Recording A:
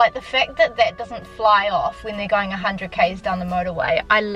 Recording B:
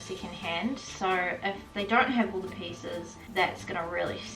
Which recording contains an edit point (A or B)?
B